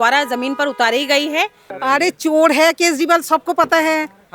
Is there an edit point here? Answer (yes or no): yes